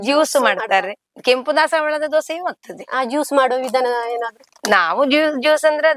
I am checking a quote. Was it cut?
no; 0 cuts

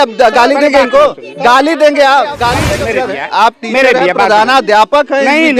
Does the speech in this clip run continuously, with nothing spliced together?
no; 1 cut; at 2.7 s

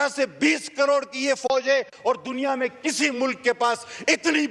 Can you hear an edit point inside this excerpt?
no; 0 cuts

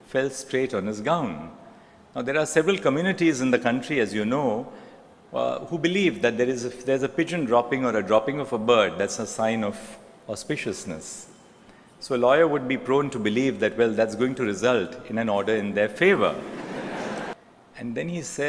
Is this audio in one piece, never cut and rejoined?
yes; 0 cuts

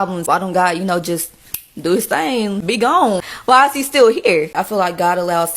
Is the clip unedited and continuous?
no; 1 cut; at 4.6 s

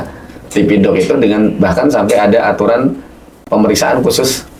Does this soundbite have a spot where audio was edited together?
no; 0 cuts

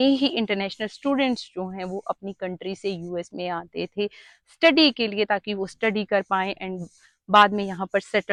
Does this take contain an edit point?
no; 0 cuts

